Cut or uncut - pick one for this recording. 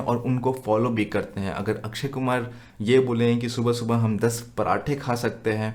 uncut